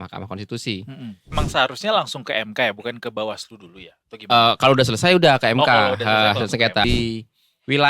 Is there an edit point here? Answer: yes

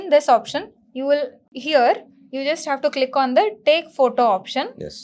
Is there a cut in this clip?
yes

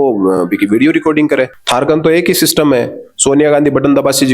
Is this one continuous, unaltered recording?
no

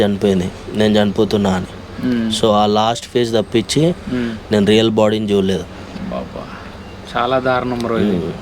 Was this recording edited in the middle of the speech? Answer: no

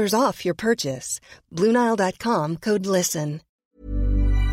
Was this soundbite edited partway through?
yes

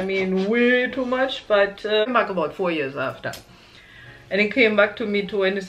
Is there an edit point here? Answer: yes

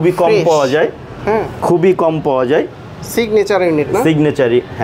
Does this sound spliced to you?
no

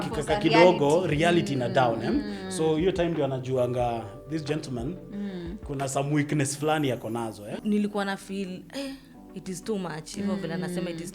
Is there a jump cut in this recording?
yes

